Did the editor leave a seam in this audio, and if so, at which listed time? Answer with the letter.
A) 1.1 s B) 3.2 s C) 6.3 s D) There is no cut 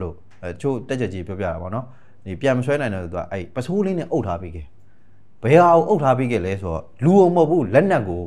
D